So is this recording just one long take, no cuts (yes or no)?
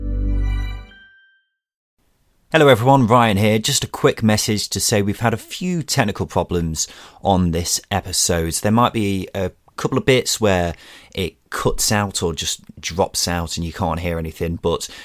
no